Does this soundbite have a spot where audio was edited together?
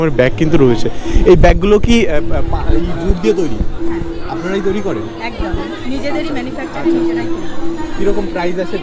no; 0 cuts

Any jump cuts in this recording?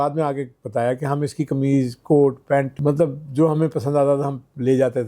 yes; 1 cut; at 2.7 s

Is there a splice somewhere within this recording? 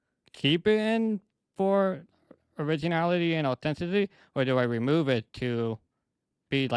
no; 0 cuts

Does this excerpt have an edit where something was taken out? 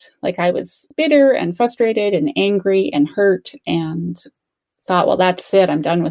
no; 0 cuts

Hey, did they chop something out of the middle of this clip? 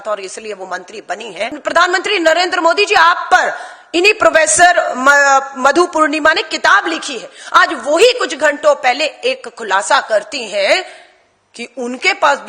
yes; 1 cut; at 1.6 s

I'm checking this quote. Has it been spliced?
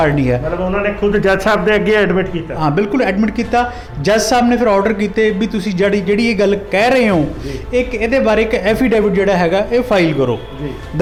no; 0 cuts

